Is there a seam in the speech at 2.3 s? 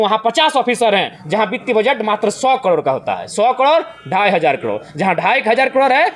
no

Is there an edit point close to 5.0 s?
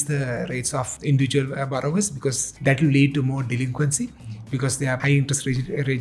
yes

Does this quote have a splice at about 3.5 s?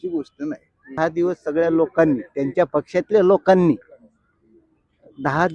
no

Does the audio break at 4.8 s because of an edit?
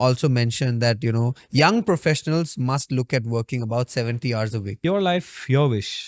yes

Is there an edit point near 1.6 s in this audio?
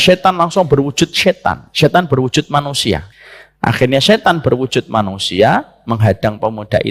no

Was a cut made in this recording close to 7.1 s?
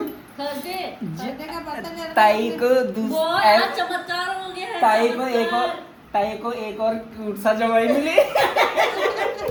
no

